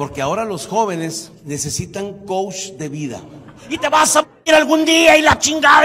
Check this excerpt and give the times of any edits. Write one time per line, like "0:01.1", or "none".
0:01.3
0:03.8